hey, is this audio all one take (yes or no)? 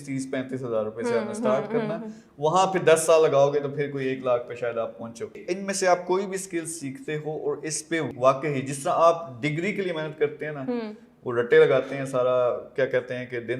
no